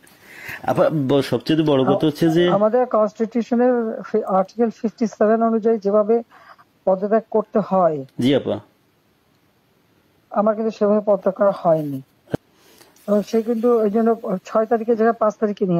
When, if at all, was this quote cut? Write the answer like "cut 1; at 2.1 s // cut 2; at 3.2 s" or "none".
cut 1; at 12.3 s